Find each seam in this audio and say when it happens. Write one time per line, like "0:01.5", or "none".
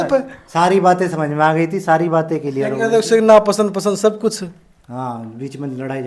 none